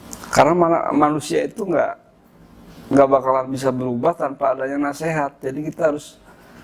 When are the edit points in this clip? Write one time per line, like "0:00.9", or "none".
none

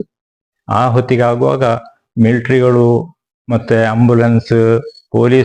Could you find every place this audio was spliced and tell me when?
none

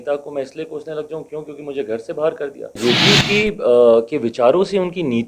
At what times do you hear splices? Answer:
0:02.8

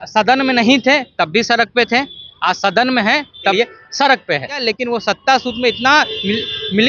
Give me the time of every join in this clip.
0:03.5
0:04.6

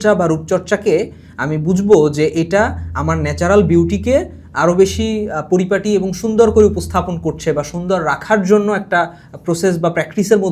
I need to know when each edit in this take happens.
none

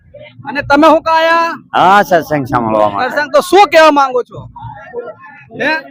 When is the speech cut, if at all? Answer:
none

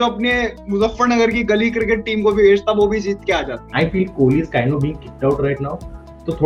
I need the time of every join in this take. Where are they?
0:03.6

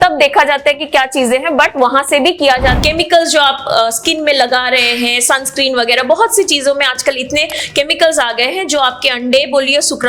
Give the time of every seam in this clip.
0:02.8

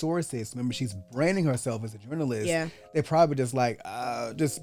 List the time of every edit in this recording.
none

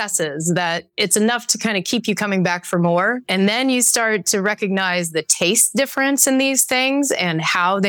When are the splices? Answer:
none

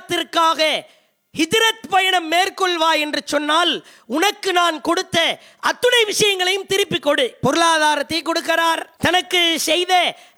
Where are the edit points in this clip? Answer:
0:07.4
0:08.9

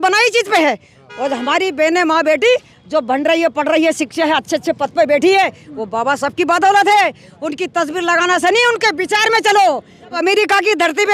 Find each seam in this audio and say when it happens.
0:10.2

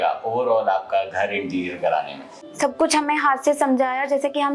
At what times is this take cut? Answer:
0:02.5

